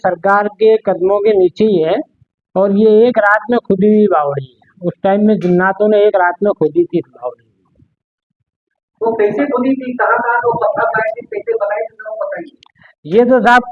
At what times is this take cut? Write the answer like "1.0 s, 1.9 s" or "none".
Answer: none